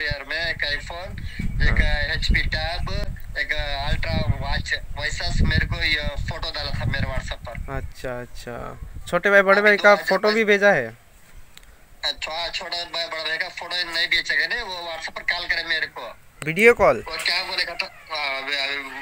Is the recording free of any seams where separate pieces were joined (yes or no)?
yes